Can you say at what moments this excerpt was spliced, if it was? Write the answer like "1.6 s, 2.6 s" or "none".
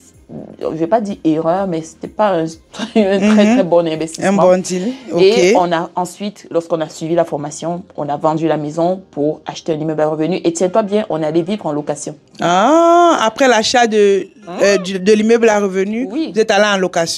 none